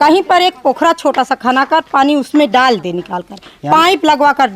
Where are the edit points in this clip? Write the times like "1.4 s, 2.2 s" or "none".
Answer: none